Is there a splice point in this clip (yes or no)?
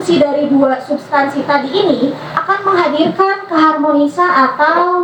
no